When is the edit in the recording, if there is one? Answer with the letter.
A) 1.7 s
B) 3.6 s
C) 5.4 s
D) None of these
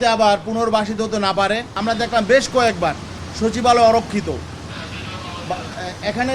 A